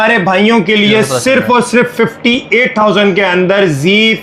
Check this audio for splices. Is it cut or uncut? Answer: uncut